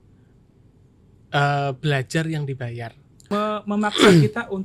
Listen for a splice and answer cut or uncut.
cut